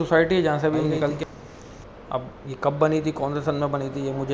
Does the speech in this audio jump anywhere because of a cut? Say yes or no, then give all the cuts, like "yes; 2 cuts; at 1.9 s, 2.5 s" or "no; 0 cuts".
yes; 1 cut; at 1.2 s